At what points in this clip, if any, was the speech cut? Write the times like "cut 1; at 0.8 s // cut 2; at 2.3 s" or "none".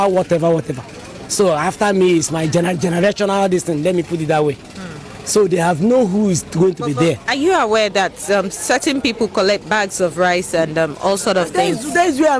none